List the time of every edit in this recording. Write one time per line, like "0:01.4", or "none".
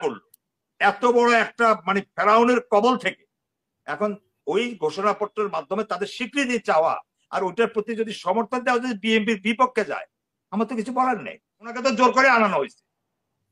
0:11.7